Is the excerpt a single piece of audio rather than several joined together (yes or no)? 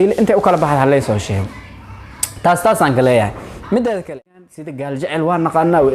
no